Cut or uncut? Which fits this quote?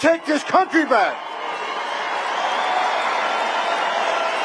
uncut